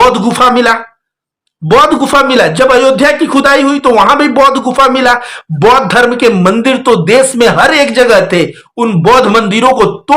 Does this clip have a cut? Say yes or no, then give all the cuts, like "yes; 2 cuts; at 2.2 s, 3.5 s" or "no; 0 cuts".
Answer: no; 0 cuts